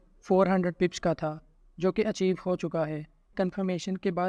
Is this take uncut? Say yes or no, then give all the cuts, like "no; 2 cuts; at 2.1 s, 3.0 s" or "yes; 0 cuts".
no; 1 cut; at 3.3 s